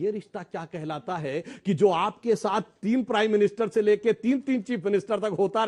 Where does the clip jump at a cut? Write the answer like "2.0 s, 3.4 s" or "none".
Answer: none